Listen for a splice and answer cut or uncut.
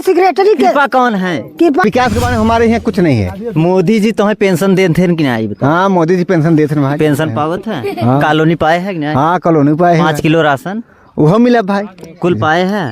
cut